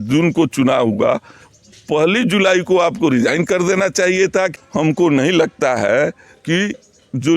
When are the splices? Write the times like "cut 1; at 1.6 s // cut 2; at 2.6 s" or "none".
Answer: cut 1; at 4.5 s